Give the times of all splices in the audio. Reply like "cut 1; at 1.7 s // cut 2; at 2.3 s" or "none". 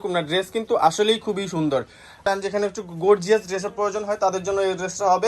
cut 1; at 2.2 s